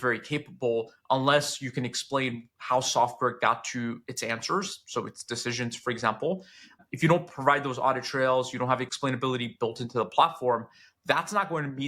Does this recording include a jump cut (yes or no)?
yes